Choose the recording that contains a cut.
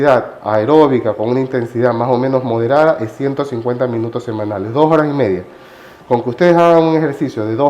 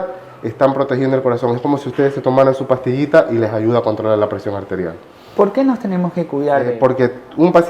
second; 1 cut; at 6.7 s

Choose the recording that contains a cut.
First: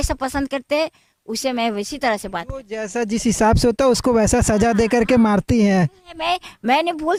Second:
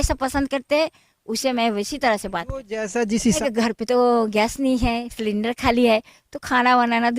second; 1 cut; at 3.4 s

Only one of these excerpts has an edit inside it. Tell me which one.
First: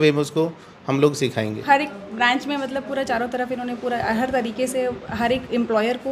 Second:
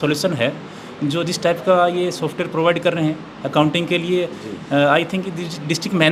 first; 1 cut; at 1.6 s

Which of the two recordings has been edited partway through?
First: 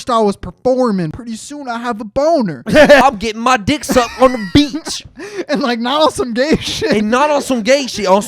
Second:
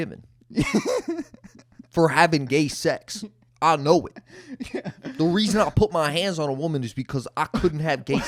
first; 2 cuts; at 1.2 s, 3.0 s

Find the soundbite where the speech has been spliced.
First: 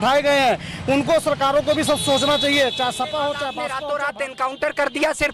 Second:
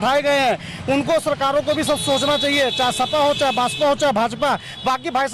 first; 1 cut; at 3.6 s

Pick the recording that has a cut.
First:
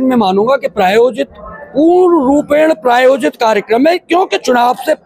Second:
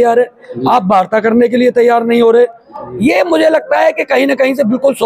second; 1 cut; at 2.6 s

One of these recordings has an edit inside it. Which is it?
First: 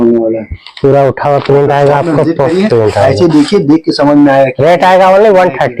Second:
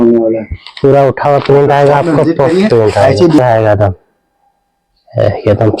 second; 1 cut; at 3.4 s

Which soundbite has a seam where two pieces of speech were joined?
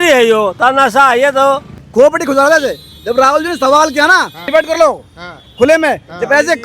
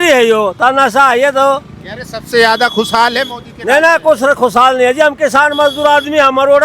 first; 2 cuts; at 1.8 s, 4.4 s

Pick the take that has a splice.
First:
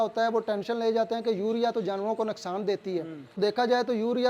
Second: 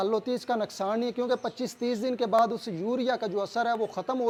first; 1 cut; at 3.4 s

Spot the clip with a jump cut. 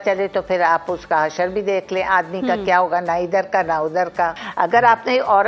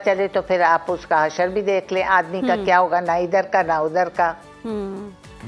first; 1 cut; at 4.4 s

